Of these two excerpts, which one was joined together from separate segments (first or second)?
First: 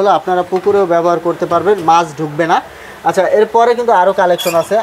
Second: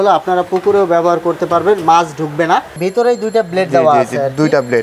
second